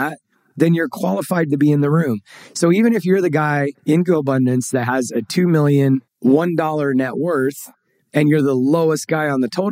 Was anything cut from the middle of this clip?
yes; 2 cuts; at 3.7 s, 6.1 s

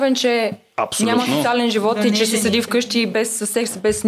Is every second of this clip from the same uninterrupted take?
yes; 0 cuts

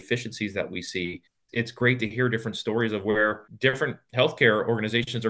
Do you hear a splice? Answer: yes; 1 cut; at 1.5 s

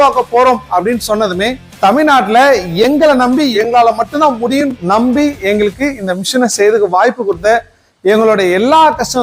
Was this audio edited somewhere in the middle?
yes; 3 cuts; at 1.6 s, 3.5 s, 4.8 s

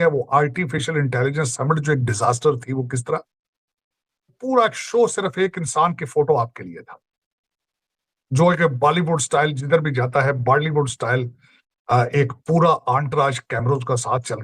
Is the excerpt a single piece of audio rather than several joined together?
no; 1 cut; at 4.4 s

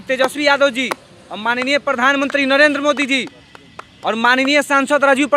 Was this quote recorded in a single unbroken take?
yes; 0 cuts

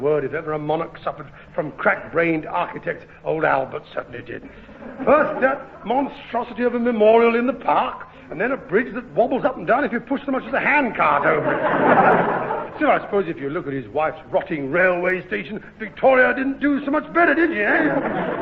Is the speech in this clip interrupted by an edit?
no; 0 cuts

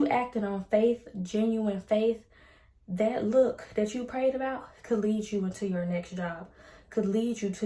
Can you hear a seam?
no; 0 cuts

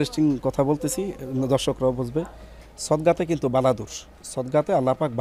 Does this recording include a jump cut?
no; 0 cuts

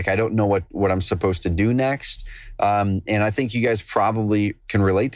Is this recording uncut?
yes; 0 cuts

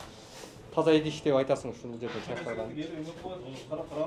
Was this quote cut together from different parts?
no; 0 cuts

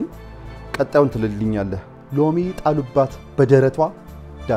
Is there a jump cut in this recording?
yes; 1 cut; at 2.0 s

